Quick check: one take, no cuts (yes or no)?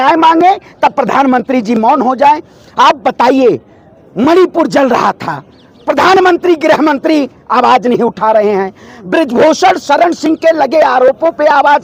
yes